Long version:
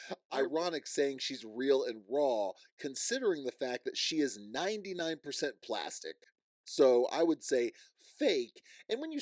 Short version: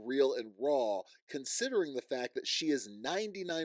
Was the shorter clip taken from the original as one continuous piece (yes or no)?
yes